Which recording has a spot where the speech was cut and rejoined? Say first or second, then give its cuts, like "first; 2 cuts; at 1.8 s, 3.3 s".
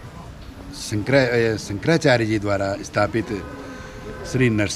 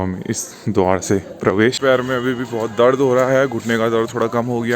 second; 1 cut; at 1.8 s